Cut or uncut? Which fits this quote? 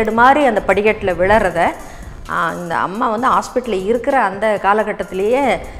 uncut